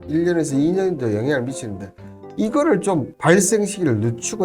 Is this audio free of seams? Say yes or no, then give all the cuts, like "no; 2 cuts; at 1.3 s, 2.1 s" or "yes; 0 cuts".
no; 1 cut; at 3.1 s